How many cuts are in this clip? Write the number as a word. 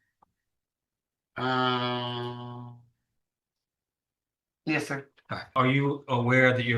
one